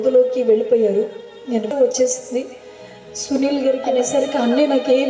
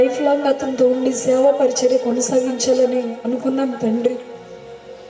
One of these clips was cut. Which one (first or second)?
first